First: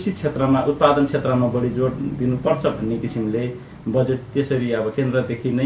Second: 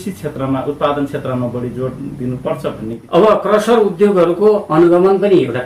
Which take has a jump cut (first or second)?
second